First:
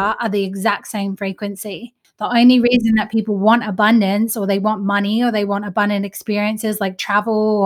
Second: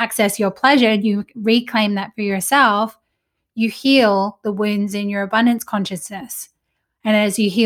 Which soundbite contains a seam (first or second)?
first